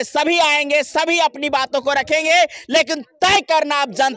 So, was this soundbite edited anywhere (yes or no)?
no